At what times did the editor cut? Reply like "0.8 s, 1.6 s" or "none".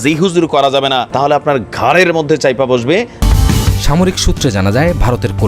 1.1 s, 3.2 s